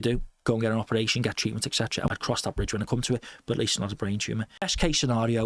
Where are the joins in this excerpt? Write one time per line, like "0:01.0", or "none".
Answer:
0:02.1
0:04.7